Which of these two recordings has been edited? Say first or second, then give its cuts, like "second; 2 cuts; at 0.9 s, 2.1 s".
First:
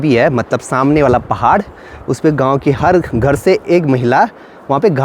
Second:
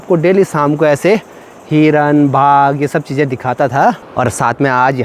second; 1 cut; at 4.1 s